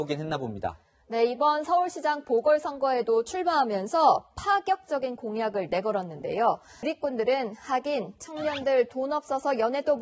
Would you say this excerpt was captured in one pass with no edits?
no; 1 cut; at 6.7 s

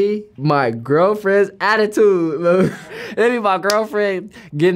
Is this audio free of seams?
no; 1 cut; at 2.9 s

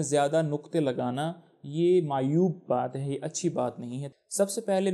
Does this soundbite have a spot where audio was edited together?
yes; 1 cut; at 4.0 s

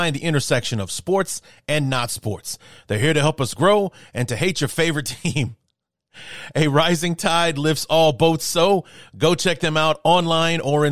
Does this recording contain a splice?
no; 0 cuts

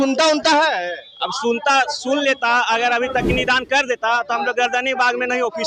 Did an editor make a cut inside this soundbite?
no; 0 cuts

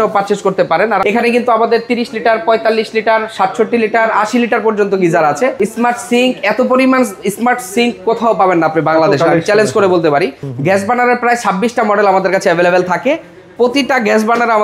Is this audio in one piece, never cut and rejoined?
no; 3 cuts; at 1.0 s, 5.5 s, 10.4 s

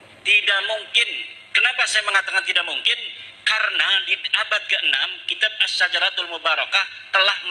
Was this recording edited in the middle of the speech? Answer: no; 0 cuts

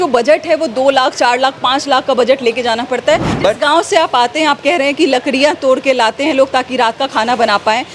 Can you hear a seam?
yes; 1 cut; at 3.3 s

